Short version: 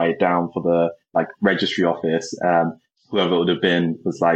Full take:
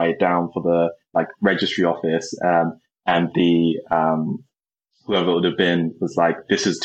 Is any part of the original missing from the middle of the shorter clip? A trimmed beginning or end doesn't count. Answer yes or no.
yes